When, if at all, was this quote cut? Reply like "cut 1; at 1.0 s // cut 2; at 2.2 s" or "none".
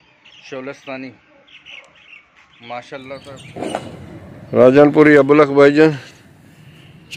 cut 1; at 3.4 s